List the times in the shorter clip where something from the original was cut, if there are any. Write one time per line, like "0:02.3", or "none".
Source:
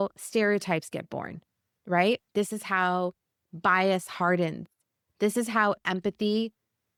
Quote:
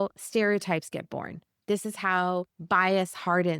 0:01.6
0:02.6